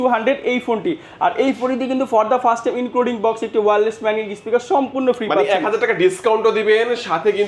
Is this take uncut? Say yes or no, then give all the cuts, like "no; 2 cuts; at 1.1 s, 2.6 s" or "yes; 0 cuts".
yes; 0 cuts